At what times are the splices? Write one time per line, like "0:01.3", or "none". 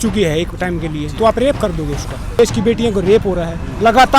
0:02.4